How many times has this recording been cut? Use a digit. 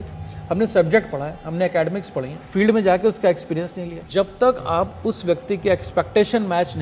2